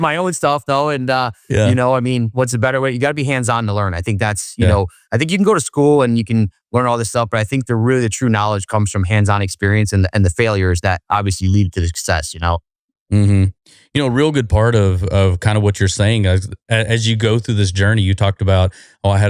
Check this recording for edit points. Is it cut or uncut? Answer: uncut